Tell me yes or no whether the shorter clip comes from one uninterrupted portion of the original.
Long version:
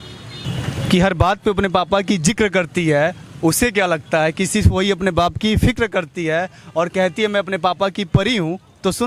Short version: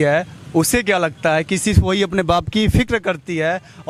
yes